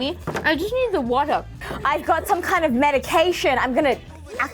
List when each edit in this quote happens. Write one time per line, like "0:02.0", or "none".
0:01.7